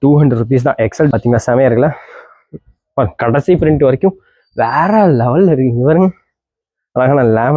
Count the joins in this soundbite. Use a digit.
1